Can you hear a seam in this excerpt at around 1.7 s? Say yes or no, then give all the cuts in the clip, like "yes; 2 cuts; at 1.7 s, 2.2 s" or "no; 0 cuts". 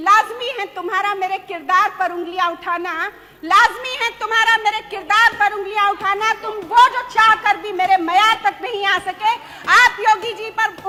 no; 0 cuts